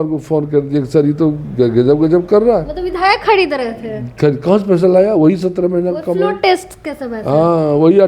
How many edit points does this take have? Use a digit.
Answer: 0